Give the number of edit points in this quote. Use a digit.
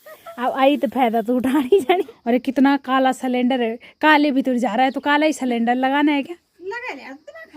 2